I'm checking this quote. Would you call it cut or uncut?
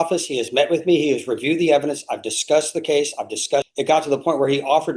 cut